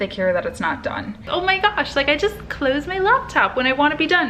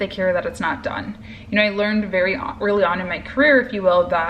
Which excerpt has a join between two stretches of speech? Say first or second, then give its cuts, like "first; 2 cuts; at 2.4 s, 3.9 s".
first; 1 cut; at 1.3 s